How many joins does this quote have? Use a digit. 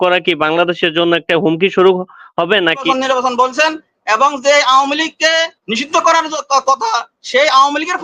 1